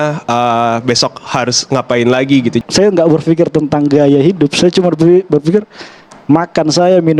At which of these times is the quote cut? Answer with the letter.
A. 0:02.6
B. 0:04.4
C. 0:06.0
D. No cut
A